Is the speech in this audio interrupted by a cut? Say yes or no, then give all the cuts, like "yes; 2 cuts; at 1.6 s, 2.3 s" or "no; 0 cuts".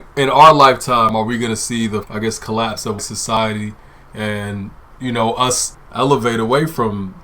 yes; 3 cuts; at 2.1 s, 3.4 s, 5.7 s